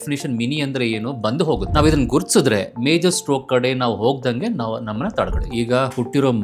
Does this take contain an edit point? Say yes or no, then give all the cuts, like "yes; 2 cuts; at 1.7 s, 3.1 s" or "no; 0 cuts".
yes; 2 cuts; at 1.7 s, 5.4 s